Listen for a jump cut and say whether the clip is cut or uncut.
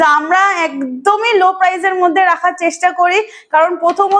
uncut